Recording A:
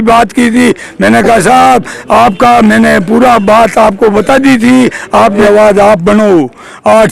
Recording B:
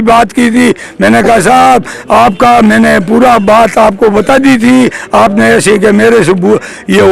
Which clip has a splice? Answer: A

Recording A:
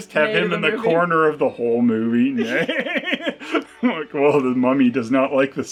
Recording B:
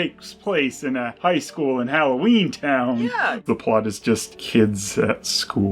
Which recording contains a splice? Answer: B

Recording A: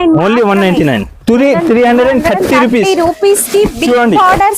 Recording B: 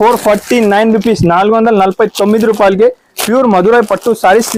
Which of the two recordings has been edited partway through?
A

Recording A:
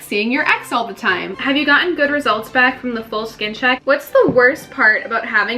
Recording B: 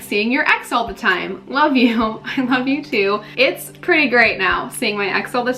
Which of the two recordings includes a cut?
A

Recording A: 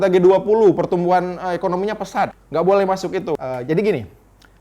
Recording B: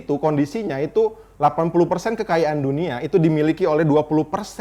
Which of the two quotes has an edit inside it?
A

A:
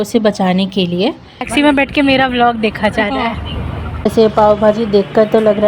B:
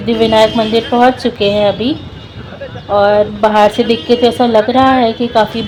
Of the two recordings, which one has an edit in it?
A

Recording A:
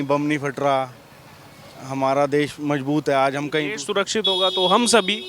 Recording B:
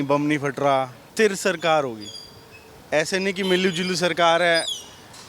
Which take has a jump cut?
B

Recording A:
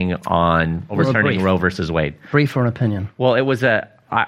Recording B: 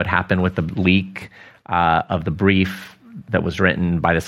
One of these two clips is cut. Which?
A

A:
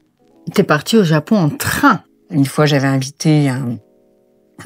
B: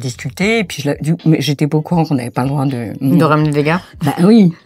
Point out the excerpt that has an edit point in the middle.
A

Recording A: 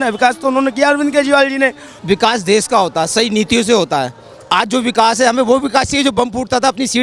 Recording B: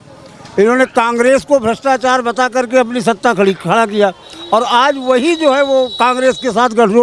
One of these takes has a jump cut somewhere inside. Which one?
A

